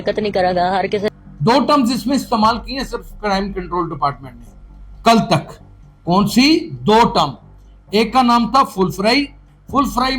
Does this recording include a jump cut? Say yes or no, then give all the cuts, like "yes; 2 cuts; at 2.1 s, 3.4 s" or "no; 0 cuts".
yes; 1 cut; at 1.1 s